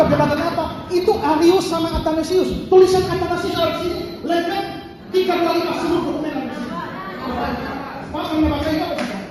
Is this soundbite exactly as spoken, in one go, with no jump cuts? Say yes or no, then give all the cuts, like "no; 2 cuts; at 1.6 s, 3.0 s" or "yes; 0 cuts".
yes; 0 cuts